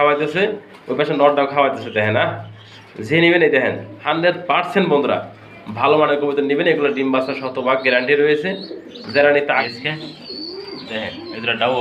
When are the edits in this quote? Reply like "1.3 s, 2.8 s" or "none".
9.7 s